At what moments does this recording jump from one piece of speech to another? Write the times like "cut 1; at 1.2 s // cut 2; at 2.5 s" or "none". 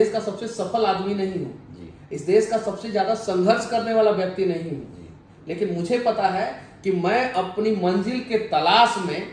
none